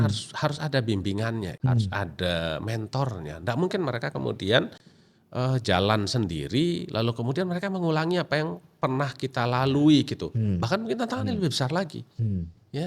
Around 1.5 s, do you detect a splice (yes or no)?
yes